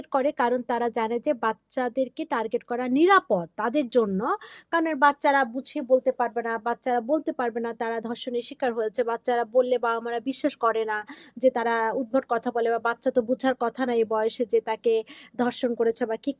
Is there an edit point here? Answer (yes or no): no